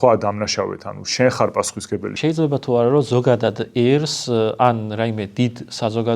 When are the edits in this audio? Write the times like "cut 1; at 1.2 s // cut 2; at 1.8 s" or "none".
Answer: cut 1; at 2.1 s